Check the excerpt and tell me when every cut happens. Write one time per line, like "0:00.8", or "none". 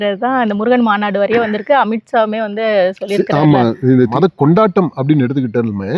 0:04.1